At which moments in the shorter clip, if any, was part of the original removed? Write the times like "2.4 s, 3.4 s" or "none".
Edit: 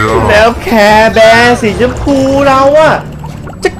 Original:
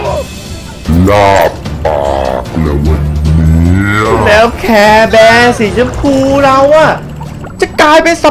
none